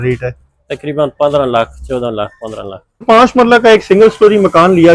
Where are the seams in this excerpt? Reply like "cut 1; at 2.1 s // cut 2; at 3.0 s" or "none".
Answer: cut 1; at 3.0 s